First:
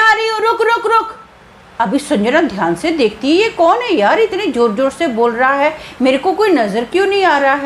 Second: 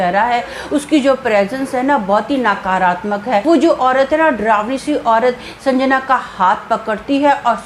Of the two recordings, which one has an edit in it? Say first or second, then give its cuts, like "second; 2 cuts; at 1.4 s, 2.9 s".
second; 1 cut; at 3.4 s